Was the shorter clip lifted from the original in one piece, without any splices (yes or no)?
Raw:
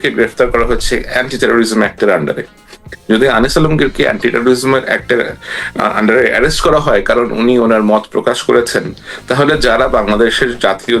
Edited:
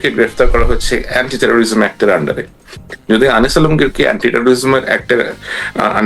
yes